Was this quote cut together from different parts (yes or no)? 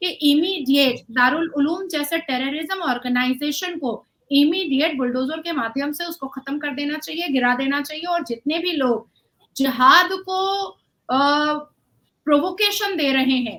no